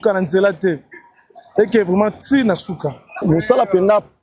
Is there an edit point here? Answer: yes; 1 cut; at 3.1 s

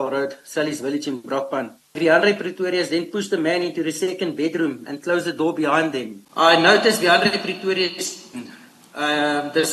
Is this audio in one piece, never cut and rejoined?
no; 2 cuts; at 2.0 s, 6.2 s

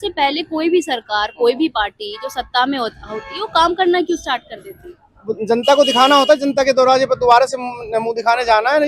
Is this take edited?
no; 0 cuts

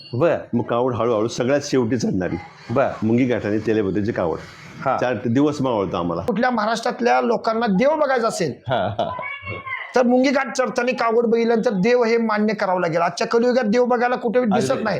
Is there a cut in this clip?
yes; 1 cut; at 6.2 s

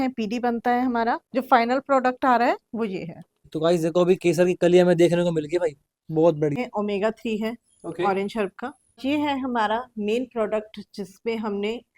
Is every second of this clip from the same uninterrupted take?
no; 4 cuts; at 1.2 s, 3.5 s, 6.6 s, 9.0 s

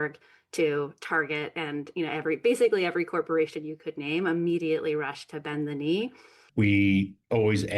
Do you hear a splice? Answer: yes; 1 cut; at 6.4 s

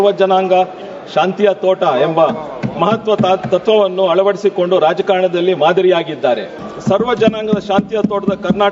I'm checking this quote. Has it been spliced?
yes; 1 cut; at 6.7 s

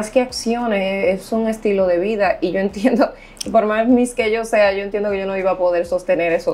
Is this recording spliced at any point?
no; 0 cuts

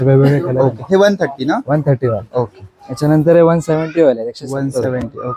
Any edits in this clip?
no; 0 cuts

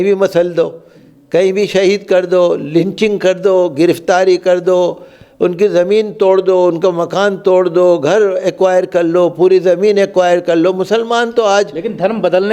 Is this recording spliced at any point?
no; 0 cuts

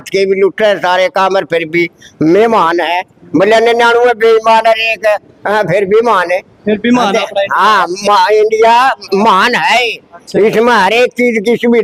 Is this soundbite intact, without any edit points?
yes; 0 cuts

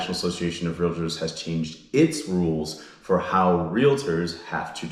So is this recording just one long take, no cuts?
yes; 0 cuts

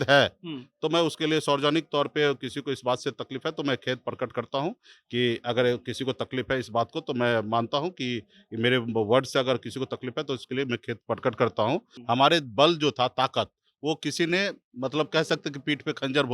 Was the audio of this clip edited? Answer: yes; 1 cut; at 11.9 s

